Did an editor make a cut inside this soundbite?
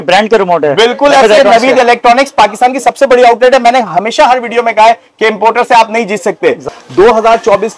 yes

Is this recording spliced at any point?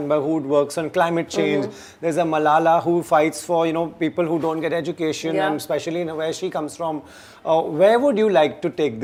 no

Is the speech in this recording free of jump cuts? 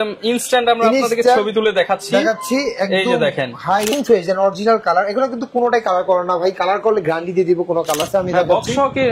no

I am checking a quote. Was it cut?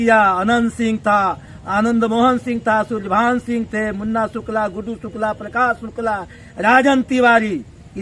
no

